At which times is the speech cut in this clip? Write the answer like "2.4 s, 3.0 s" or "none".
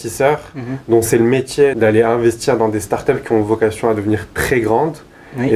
1.7 s